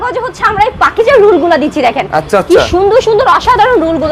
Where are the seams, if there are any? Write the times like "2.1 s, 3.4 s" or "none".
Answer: none